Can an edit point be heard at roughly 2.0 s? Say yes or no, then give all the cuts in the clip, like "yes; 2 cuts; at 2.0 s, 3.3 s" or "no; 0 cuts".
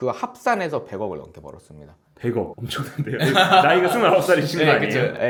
no; 0 cuts